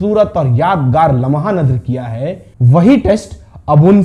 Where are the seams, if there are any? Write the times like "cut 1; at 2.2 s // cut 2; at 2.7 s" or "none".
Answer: cut 1; at 2.5 s